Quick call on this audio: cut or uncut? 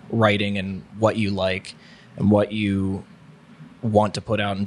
uncut